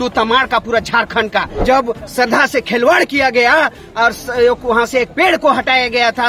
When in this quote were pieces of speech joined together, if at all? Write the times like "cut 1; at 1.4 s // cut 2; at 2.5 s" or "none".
cut 1; at 1.5 s